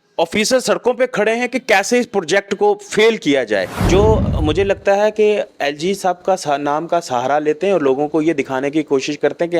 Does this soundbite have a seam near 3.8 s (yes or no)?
yes